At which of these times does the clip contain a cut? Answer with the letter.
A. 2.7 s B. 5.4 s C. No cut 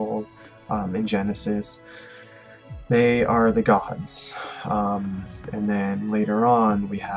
C